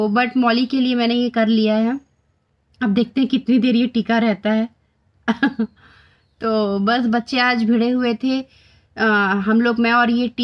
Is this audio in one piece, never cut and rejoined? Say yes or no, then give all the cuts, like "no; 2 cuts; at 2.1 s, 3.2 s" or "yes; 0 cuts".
yes; 0 cuts